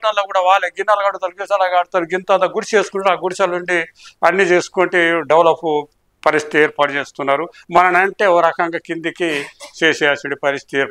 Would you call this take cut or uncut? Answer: uncut